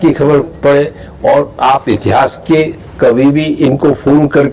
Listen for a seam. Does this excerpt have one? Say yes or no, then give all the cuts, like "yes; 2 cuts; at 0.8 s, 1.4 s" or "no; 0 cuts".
no; 0 cuts